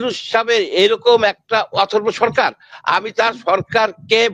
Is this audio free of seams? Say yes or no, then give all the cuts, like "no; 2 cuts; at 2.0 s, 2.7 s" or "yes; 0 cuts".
yes; 0 cuts